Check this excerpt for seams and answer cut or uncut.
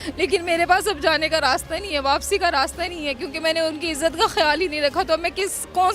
uncut